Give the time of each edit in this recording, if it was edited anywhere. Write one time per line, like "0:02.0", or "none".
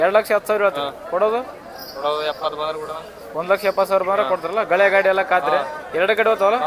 none